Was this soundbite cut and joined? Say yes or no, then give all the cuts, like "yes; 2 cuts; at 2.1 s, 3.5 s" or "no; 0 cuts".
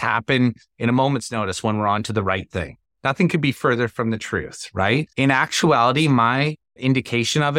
yes; 3 cuts; at 2.8 s, 5.1 s, 6.7 s